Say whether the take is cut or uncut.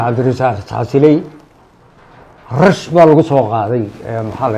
uncut